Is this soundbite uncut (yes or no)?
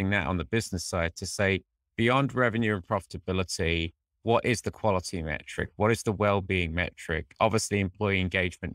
yes